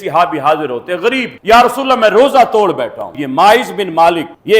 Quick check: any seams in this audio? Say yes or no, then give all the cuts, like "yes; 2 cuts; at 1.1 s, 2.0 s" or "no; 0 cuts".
yes; 1 cut; at 3.1 s